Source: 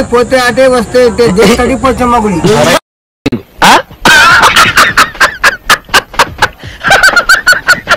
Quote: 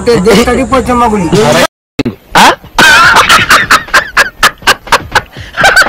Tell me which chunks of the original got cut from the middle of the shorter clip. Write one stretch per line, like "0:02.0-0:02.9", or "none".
0:03.0-0:03.1